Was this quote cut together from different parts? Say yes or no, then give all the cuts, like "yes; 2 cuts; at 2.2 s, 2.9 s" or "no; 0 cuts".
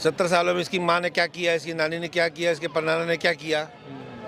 no; 0 cuts